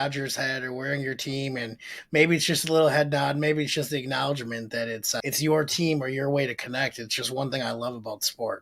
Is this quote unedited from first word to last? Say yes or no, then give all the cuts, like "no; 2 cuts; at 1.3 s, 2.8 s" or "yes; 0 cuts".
no; 1 cut; at 5.2 s